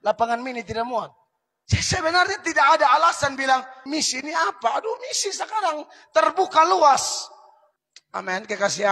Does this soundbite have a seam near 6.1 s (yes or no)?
no